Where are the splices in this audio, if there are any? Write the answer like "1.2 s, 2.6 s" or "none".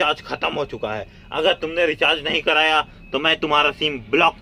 none